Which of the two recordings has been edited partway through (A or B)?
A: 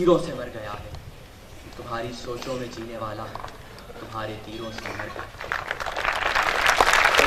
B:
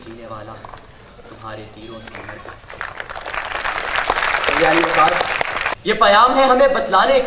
B